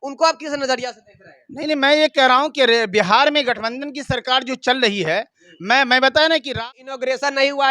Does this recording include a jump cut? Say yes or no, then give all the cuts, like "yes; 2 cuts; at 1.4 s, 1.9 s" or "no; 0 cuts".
yes; 1 cut; at 6.5 s